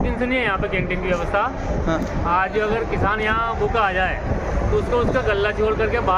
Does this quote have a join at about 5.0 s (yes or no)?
no